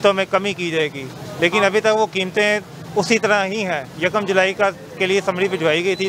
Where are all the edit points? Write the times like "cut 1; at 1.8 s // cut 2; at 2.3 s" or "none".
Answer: none